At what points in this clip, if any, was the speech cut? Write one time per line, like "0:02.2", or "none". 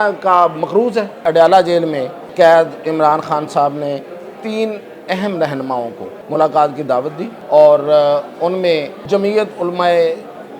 0:01.2
0:02.2
0:06.1
0:07.3
0:08.9